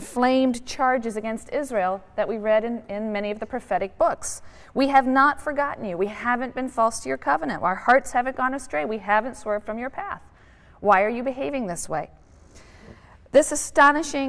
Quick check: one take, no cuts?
yes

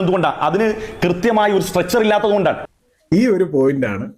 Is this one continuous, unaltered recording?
yes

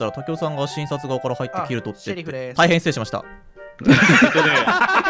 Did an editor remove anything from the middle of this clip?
no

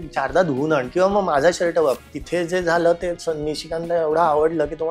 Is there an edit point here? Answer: yes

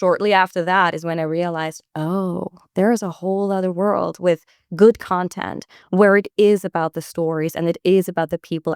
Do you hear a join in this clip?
no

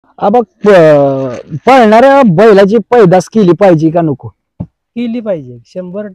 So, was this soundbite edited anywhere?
no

